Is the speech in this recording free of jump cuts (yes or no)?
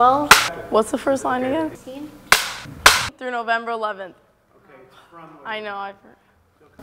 yes